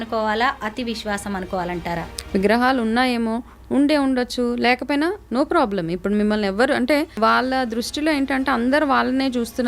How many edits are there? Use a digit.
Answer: 2